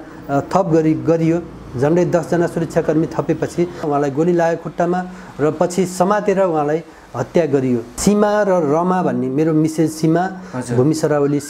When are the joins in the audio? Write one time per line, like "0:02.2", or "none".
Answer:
0:03.8
0:07.9